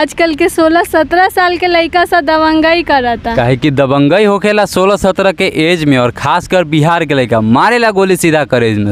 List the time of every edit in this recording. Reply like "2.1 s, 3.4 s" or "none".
none